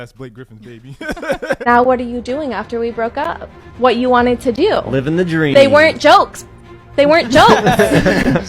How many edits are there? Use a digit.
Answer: 1